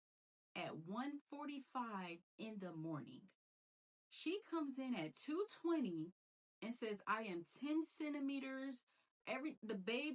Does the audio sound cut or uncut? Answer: uncut